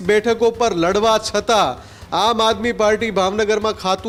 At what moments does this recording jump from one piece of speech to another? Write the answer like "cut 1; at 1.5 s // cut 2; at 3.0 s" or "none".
none